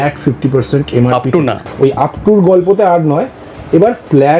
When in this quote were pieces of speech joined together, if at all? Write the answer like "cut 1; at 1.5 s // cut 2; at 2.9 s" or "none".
cut 1; at 1.7 s